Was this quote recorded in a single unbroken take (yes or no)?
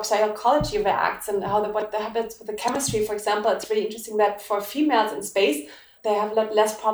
no